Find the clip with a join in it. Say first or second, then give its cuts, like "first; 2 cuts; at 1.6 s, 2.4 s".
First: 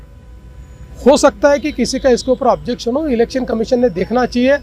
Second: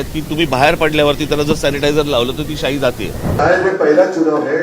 second; 1 cut; at 3.1 s